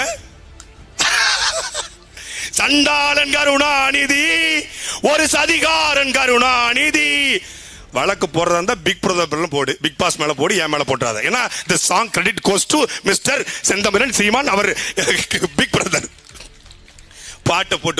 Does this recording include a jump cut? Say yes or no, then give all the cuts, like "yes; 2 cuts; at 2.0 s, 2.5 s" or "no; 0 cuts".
no; 0 cuts